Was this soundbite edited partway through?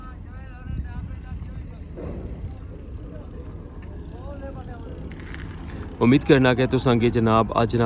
no; 0 cuts

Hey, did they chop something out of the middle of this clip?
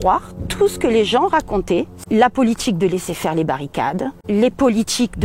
yes; 2 cuts; at 1.9 s, 4.1 s

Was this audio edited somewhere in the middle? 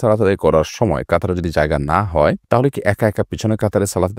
yes; 1 cut; at 2.4 s

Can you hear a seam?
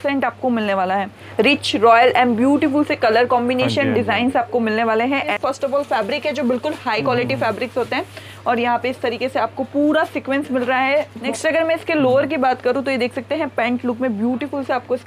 yes; 3 cuts; at 1.2 s, 5.3 s, 11.2 s

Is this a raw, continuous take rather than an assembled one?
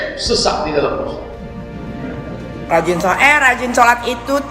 no; 1 cut; at 2.7 s

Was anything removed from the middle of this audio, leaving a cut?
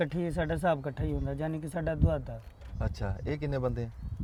no; 0 cuts

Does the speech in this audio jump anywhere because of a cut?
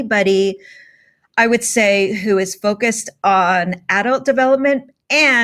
no; 0 cuts

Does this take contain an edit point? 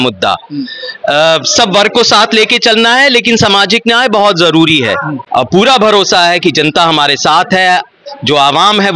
yes; 1 cut; at 5.2 s

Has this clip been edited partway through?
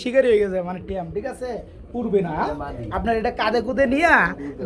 no; 0 cuts

